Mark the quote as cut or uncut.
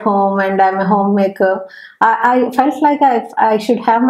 uncut